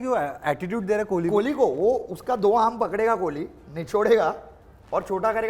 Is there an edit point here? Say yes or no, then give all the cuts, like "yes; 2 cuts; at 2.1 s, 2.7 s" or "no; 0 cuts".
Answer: no; 0 cuts